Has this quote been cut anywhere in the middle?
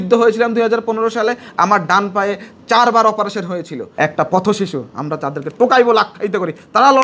yes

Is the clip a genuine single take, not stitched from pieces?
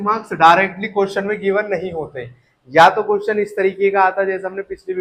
yes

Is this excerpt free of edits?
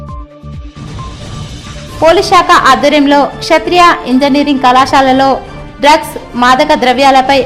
no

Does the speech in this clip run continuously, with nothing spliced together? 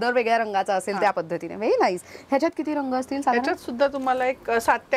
yes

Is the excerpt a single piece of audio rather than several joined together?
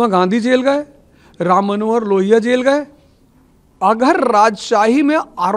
yes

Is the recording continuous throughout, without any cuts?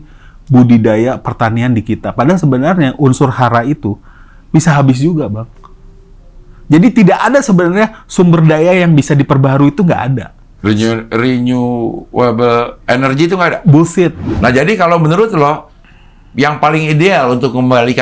no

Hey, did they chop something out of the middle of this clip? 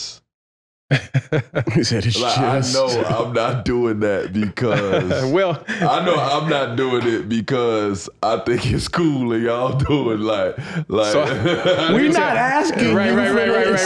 no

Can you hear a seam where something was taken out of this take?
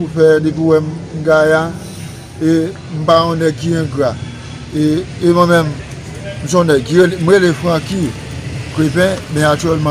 no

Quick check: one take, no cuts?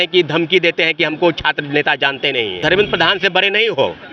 no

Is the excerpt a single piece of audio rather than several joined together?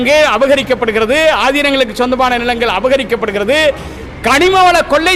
yes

